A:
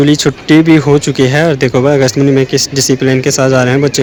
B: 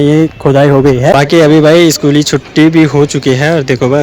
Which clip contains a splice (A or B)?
B